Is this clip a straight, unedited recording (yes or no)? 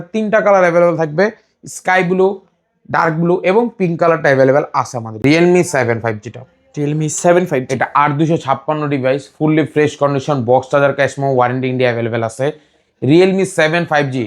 no